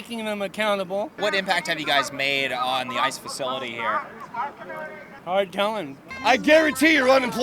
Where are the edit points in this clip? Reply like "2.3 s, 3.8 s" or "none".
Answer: 1.1 s, 5.1 s, 6.0 s